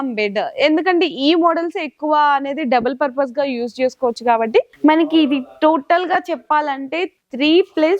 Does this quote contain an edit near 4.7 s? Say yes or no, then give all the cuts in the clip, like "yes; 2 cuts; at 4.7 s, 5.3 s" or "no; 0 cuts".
yes; 1 cut; at 4.7 s